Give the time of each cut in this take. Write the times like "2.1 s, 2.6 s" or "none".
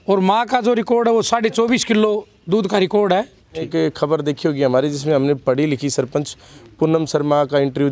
3.7 s